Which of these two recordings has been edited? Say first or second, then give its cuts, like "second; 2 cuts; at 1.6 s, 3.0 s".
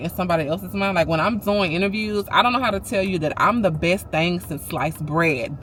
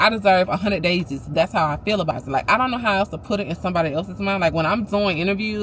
second; 1 cut; at 2.2 s